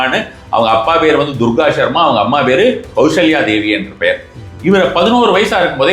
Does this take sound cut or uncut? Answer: uncut